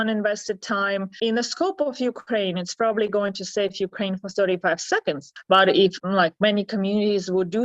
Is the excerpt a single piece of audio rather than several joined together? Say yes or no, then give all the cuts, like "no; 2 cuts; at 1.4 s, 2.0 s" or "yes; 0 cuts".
no; 2 cuts; at 1.1 s, 6.0 s